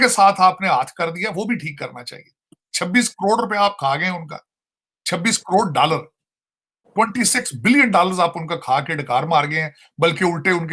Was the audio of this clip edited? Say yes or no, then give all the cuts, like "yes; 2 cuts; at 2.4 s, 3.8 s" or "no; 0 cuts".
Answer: no; 0 cuts